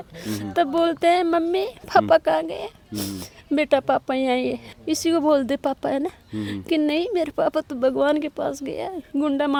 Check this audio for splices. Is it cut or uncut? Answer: uncut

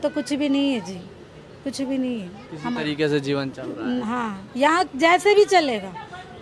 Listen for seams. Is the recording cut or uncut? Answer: uncut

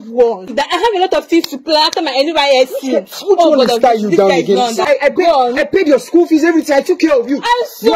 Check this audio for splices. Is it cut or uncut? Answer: cut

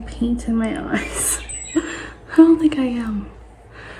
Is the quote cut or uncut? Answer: uncut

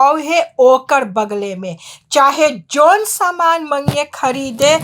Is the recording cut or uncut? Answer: uncut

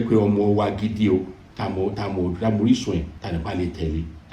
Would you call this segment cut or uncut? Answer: cut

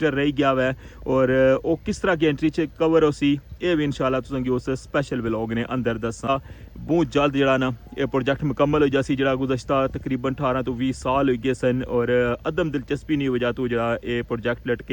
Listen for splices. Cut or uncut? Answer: cut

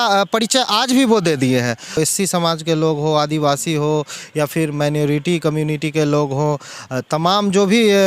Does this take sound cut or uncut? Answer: cut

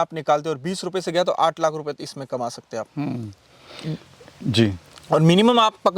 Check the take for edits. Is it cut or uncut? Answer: uncut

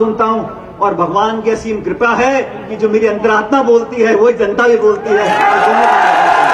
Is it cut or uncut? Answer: uncut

